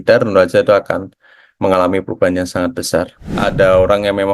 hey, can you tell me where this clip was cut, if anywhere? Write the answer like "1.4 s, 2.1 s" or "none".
3.2 s